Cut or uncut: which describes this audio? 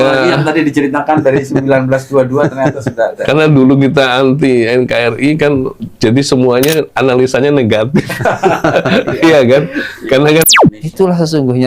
cut